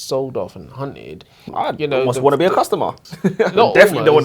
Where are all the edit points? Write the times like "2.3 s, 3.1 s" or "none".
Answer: 1.4 s, 3.0 s

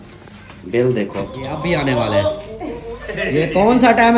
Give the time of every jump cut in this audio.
1.4 s

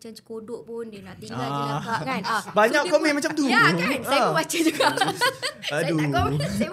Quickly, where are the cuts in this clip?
none

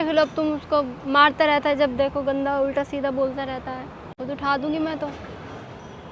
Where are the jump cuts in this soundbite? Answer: 4.1 s

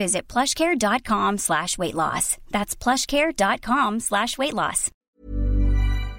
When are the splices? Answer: 4.9 s

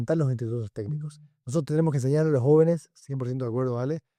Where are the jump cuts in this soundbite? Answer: none

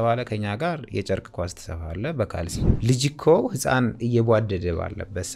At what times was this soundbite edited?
2.6 s

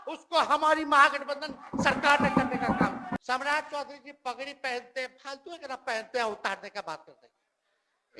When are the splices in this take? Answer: 3.2 s

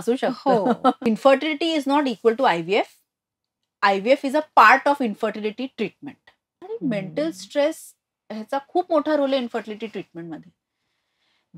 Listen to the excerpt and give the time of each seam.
1.0 s, 6.5 s

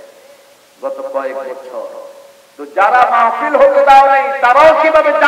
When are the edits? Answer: none

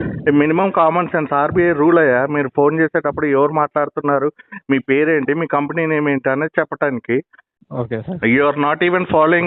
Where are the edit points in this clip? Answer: 7.6 s

